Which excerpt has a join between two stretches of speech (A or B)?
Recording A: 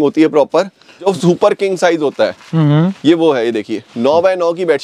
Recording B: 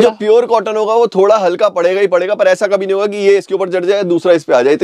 A